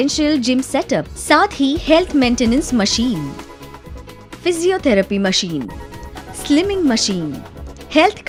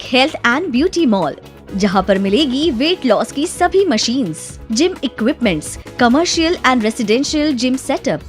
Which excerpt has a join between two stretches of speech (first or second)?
second